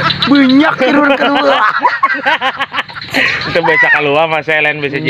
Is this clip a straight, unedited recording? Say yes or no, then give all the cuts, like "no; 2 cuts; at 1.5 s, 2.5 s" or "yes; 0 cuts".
yes; 0 cuts